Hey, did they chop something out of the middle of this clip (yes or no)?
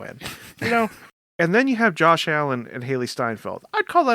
yes